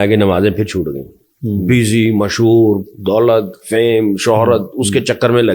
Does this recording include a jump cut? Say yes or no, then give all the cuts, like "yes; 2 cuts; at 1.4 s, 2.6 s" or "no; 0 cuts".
no; 0 cuts